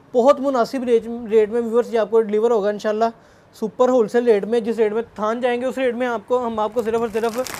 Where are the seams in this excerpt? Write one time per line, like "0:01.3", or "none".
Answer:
none